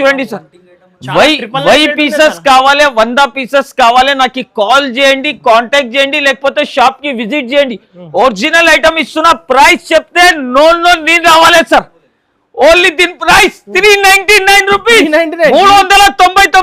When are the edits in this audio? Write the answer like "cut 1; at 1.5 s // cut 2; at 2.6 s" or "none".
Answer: none